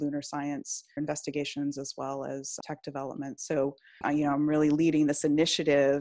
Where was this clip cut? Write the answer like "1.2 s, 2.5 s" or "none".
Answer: 1.0 s, 2.6 s, 4.0 s